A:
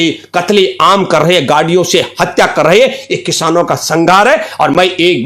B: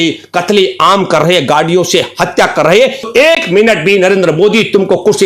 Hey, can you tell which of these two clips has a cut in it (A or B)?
B